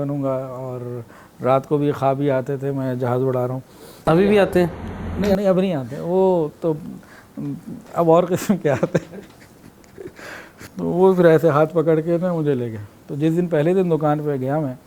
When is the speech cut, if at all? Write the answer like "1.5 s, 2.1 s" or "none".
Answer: none